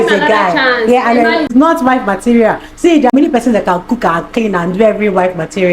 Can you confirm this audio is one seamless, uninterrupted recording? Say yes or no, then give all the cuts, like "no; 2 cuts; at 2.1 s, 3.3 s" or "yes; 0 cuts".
no; 2 cuts; at 1.5 s, 3.1 s